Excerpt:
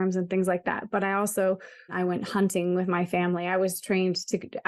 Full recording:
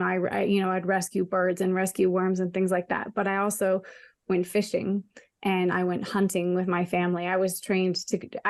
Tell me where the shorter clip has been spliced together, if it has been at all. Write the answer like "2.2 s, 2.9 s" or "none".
1.9 s